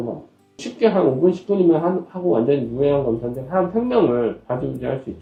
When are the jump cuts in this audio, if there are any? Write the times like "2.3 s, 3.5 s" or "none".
none